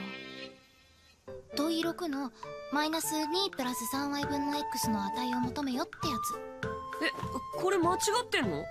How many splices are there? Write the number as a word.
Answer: zero